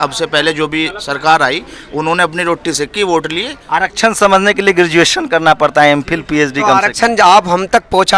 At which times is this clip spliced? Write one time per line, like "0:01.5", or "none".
0:03.5